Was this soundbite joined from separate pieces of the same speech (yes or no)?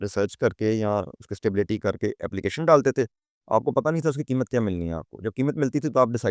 no